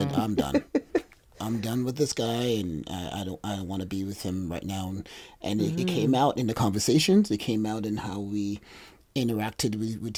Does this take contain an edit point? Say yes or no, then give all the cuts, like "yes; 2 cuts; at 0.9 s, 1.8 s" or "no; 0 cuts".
no; 0 cuts